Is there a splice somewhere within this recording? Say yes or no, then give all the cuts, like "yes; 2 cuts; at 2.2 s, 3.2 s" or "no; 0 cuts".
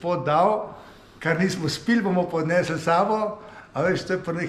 no; 0 cuts